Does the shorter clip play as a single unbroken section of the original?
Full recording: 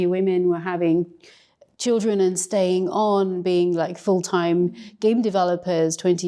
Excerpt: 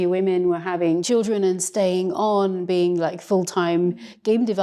no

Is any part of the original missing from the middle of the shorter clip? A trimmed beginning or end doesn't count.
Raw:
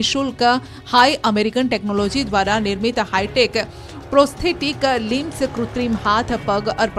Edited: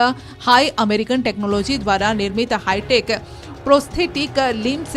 no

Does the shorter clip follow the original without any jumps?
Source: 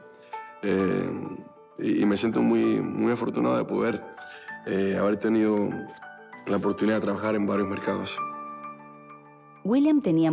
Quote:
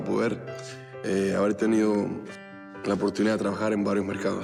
yes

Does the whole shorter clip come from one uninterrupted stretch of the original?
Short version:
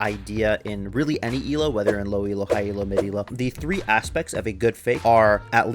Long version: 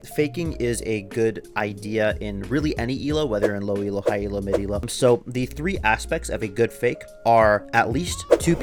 no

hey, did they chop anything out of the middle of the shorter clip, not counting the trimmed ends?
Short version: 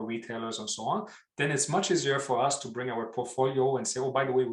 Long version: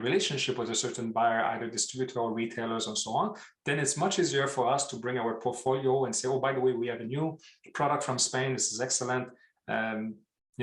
no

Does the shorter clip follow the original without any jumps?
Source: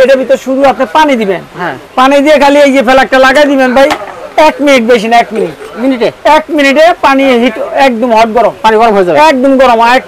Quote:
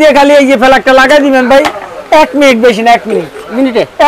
yes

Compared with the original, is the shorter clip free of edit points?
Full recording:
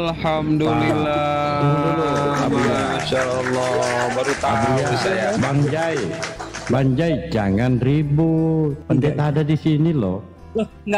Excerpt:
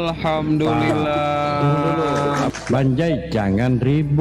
no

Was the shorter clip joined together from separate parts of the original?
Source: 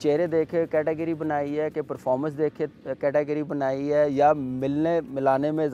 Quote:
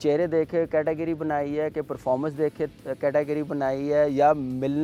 no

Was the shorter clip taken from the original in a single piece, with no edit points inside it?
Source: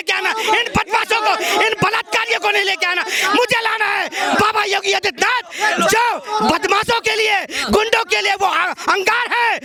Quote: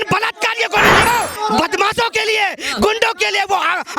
no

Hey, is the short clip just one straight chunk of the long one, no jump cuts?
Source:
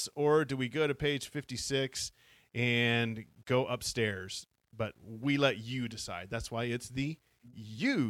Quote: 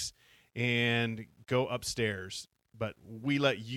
yes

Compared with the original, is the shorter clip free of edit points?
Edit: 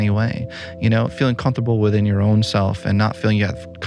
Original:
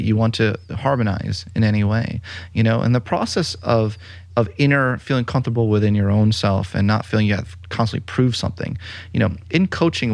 no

